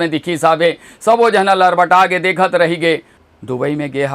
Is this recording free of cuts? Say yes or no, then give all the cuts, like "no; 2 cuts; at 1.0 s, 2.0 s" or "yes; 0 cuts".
no; 1 cut; at 3.2 s